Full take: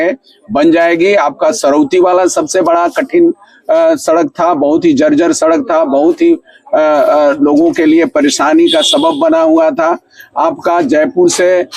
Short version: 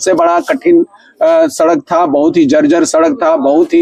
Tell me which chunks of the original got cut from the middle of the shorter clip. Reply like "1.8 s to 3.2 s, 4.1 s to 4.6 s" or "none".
none